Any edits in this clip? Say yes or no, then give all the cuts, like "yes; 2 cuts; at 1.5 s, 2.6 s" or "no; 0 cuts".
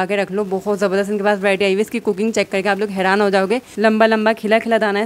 yes; 1 cut; at 3.7 s